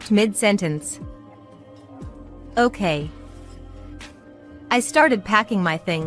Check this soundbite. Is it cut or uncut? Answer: uncut